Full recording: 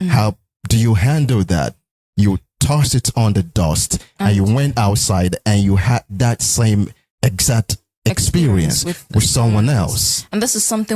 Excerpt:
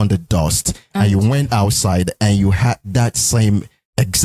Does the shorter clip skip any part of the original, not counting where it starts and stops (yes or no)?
no